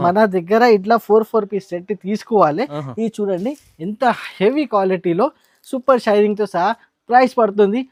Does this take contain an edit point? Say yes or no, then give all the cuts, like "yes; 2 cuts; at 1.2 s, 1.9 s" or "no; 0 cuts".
no; 0 cuts